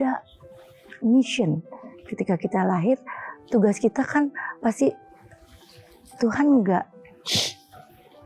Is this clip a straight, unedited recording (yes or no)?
yes